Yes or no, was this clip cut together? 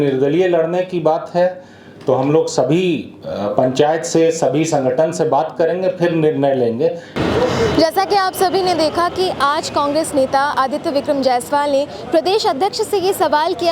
no